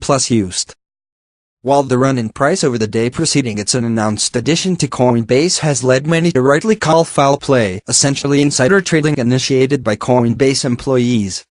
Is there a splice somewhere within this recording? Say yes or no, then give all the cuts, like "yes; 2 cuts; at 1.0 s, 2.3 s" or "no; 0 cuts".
yes; 1 cut; at 7.4 s